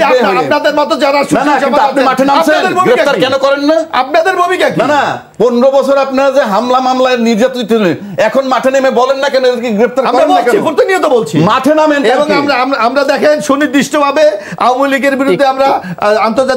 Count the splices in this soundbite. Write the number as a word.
zero